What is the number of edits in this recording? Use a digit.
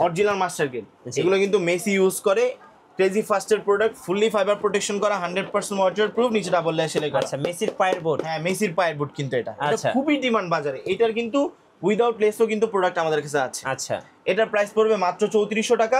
0